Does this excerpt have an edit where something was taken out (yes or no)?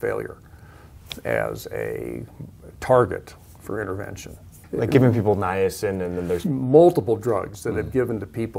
yes